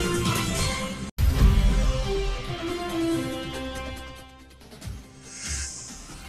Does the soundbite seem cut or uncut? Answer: cut